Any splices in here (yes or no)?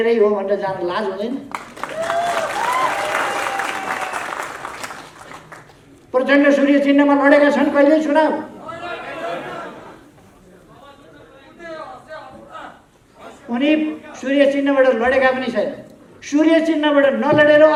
no